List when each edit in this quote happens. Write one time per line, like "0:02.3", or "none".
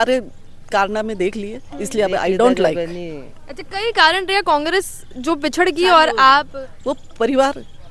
none